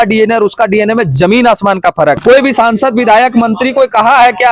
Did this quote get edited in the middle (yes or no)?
yes